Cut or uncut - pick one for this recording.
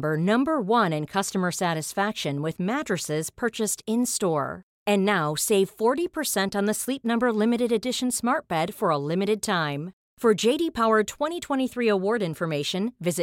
uncut